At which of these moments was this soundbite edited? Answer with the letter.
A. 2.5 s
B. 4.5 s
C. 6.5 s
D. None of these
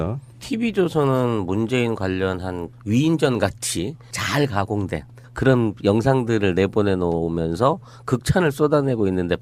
A